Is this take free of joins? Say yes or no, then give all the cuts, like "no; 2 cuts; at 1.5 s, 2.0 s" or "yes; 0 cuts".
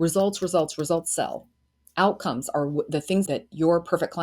no; 1 cut; at 3.3 s